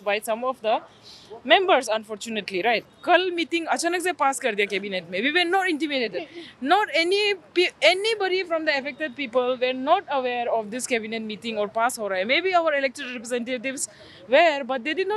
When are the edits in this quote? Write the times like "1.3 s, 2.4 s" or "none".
2.9 s

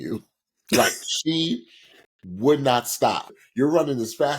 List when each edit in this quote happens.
3.3 s

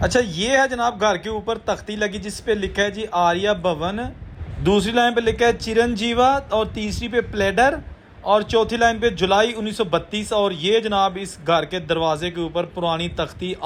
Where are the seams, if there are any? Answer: none

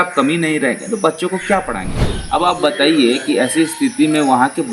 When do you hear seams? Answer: 1.9 s

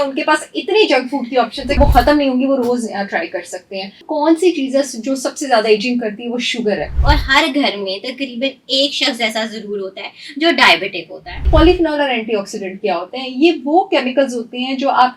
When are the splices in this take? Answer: 1.8 s, 4.0 s, 6.9 s, 11.5 s

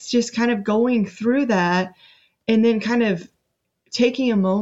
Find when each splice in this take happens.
none

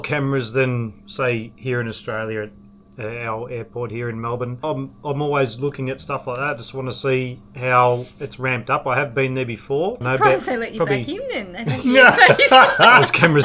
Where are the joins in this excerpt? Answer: 4.6 s, 10.0 s

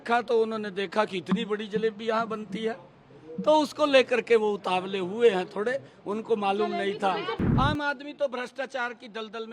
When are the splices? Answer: 7.3 s

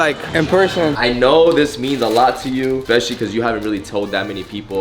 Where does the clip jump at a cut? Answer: 0.9 s, 2.8 s

